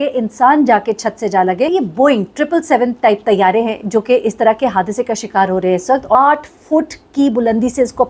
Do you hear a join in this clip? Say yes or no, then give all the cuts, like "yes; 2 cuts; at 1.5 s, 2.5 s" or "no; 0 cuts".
yes; 2 cuts; at 1.7 s, 6.2 s